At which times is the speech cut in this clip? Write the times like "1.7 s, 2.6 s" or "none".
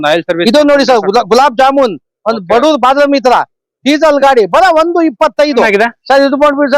5.7 s